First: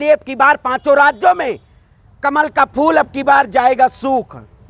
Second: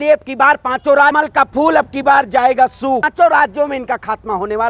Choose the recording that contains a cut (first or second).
second